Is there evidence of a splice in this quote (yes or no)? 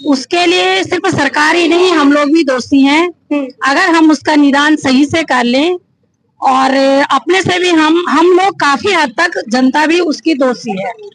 no